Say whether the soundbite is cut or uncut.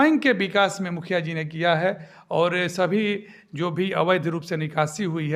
uncut